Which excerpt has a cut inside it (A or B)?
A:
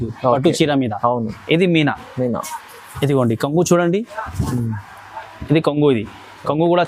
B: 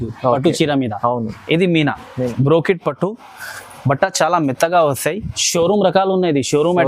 B